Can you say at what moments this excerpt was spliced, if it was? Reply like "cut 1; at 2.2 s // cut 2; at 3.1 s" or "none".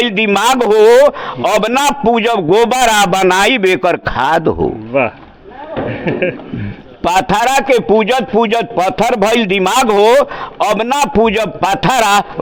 none